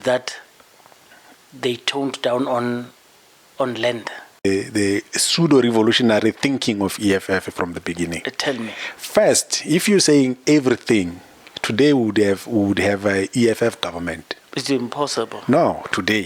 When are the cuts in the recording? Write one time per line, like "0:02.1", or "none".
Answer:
0:04.4